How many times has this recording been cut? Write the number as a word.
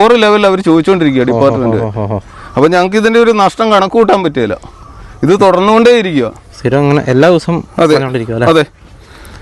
zero